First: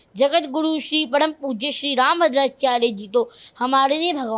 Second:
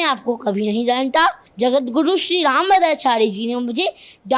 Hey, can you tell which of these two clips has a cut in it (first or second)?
second